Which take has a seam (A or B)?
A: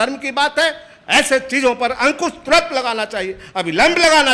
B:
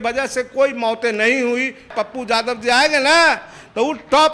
B